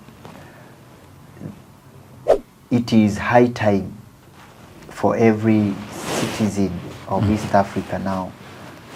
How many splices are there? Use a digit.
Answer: 1